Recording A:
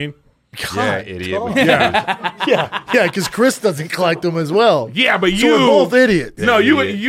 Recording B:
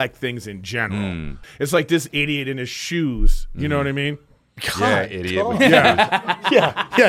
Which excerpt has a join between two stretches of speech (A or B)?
B